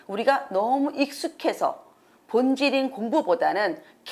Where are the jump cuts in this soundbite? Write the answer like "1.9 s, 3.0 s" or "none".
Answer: none